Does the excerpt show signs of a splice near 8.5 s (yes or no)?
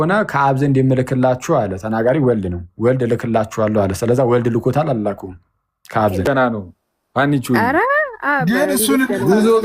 no